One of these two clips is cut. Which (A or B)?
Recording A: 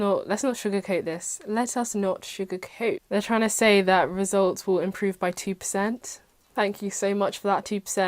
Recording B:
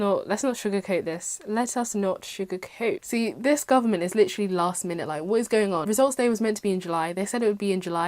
B